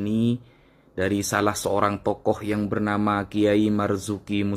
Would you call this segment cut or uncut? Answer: uncut